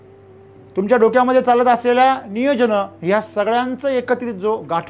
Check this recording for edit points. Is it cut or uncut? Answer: uncut